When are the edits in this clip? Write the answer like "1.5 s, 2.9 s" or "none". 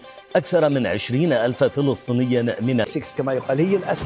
2.9 s